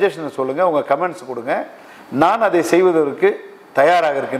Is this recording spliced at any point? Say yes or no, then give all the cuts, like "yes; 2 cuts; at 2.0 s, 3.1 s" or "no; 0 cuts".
no; 0 cuts